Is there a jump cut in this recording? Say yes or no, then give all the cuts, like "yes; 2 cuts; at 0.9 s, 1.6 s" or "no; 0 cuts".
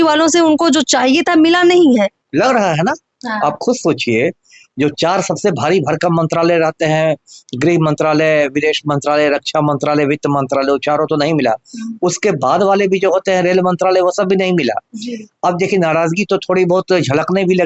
no; 0 cuts